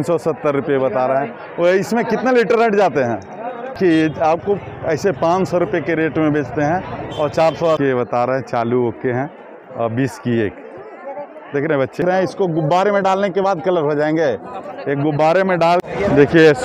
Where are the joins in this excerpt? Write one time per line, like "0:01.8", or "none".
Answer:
0:03.8
0:07.8
0:12.0
0:15.8